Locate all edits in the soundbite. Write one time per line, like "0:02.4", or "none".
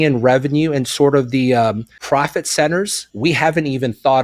0:01.9
0:03.0